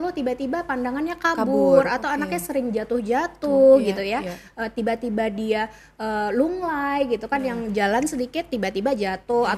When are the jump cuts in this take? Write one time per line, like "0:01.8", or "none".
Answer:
none